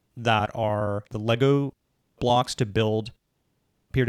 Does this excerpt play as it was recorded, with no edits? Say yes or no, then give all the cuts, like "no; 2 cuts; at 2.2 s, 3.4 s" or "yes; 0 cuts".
no; 1 cut; at 1.0 s